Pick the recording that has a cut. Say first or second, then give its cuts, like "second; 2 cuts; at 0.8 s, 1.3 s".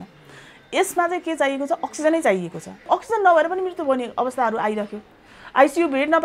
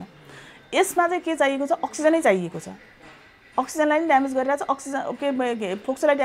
first; 1 cut; at 2.8 s